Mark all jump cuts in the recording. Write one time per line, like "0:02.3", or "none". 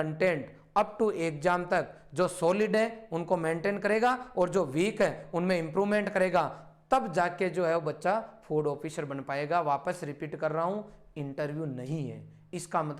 none

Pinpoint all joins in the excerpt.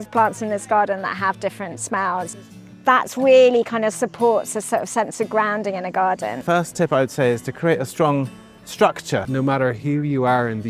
0:02.3
0:06.4
0:09.3

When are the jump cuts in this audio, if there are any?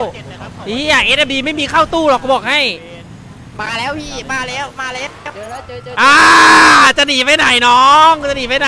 0:03.5

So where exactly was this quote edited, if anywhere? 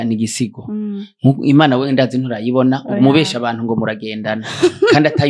none

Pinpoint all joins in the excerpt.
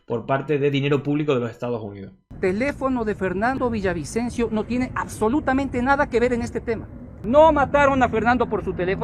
0:02.2
0:03.5
0:07.1

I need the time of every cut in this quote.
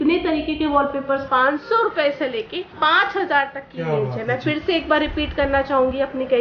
0:01.2

